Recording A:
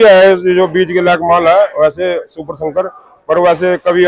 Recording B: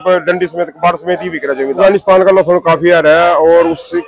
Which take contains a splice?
B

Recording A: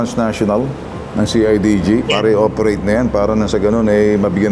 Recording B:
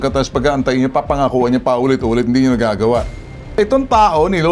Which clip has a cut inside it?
B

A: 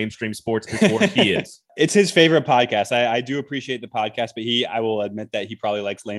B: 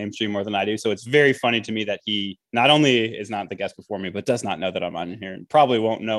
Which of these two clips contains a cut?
A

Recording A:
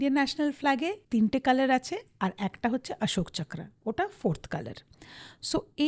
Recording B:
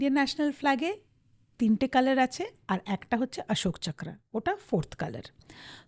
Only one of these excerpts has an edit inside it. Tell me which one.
A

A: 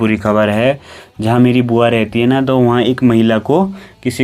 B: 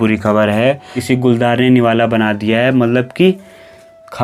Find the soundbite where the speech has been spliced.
B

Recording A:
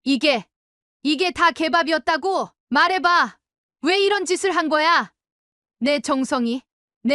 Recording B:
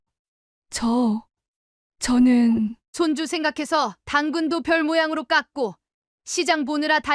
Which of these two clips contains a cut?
A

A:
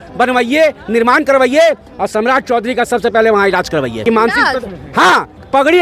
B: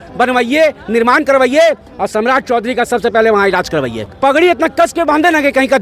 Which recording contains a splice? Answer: B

